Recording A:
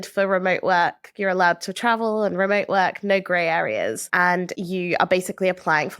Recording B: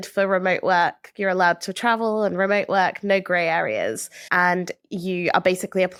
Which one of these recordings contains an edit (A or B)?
A